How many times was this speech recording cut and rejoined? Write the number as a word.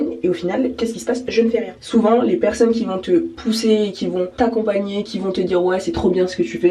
three